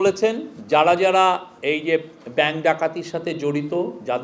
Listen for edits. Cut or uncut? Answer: uncut